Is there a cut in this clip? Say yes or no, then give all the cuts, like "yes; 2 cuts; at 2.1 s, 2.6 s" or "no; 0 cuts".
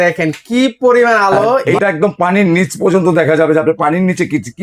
yes; 1 cut; at 1.7 s